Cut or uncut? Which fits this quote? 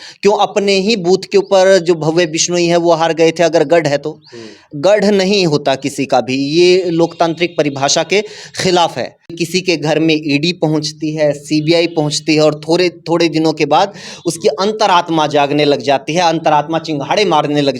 cut